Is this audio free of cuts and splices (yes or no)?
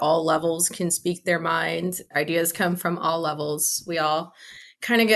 no